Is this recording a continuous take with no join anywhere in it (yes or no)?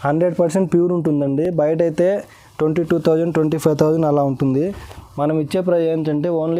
yes